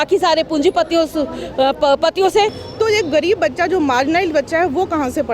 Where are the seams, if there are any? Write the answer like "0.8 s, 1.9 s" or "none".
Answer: 2.6 s